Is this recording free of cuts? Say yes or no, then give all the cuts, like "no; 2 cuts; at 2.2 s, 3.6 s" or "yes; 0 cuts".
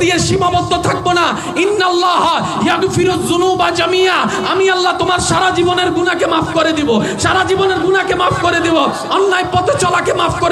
yes; 0 cuts